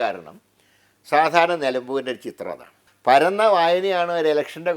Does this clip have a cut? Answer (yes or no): yes